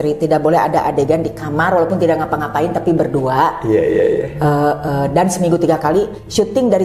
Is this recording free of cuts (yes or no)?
yes